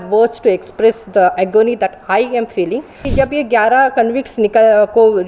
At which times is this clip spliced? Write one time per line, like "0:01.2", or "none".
0:03.0